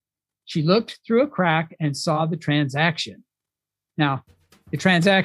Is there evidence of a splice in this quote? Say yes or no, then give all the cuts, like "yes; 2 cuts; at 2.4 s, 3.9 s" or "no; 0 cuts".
yes; 1 cut; at 2.2 s